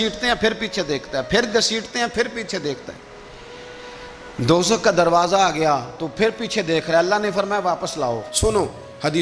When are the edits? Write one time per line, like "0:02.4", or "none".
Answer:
0:08.3